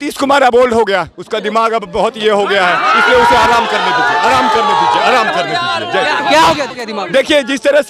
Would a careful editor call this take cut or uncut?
cut